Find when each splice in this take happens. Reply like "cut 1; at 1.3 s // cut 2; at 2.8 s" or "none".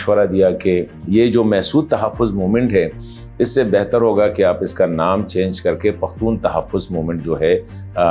cut 1; at 1.0 s

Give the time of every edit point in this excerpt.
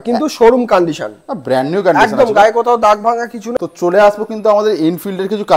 cut 1; at 3.4 s

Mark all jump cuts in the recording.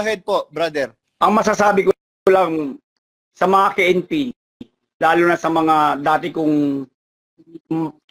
cut 1; at 1.0 s

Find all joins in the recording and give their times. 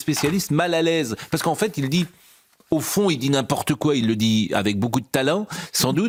none

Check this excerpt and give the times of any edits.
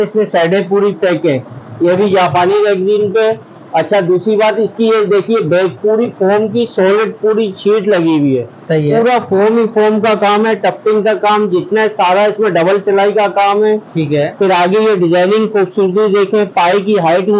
none

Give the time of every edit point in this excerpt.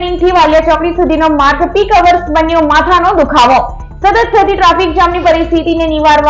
none

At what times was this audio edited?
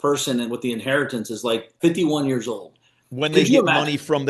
cut 1; at 1.8 s

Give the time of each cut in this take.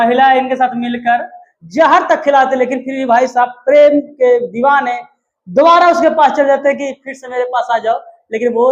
none

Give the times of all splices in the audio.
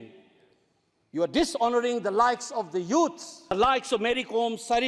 cut 1; at 3.3 s

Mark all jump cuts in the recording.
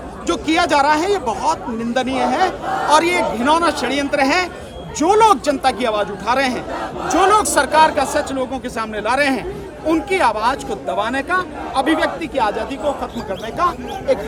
none

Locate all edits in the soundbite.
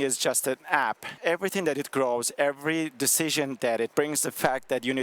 cut 1; at 1.2 s // cut 2; at 3.9 s

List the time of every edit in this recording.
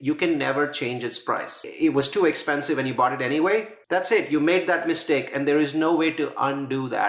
cut 1; at 1.7 s // cut 2; at 3.8 s

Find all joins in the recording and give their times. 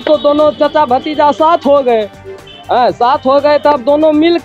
none

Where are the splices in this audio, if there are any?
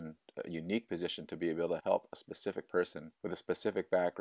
cut 1; at 1.8 s // cut 2; at 3.1 s

